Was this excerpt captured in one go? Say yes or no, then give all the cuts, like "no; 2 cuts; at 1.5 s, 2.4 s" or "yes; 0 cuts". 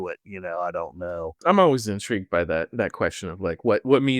no; 1 cut; at 1.4 s